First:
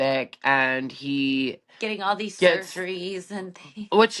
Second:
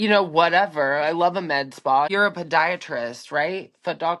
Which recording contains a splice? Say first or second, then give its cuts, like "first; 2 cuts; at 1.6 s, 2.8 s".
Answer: second; 1 cut; at 2.1 s